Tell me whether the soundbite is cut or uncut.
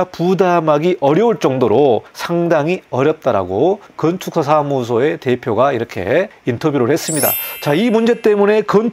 cut